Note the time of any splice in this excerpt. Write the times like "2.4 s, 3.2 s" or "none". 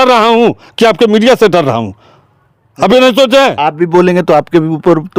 none

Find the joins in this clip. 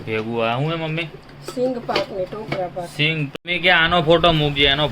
3.3 s

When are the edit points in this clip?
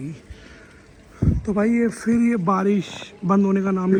none

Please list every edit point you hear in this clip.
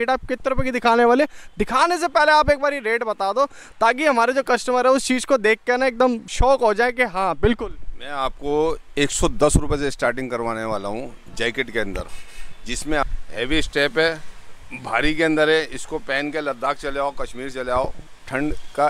13.0 s

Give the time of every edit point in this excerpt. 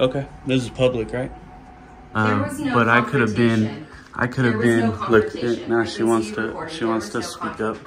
1.9 s

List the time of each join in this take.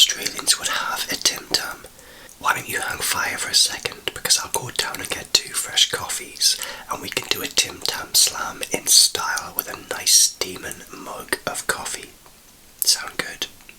none

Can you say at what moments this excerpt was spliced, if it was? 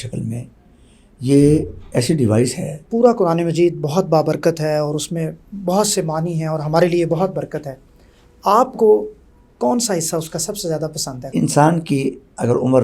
2.8 s, 11.2 s

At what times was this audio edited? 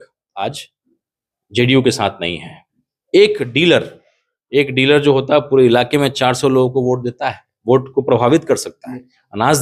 none

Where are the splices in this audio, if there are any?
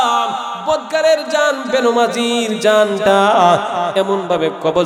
none

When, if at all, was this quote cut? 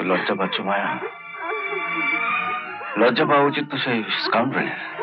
none

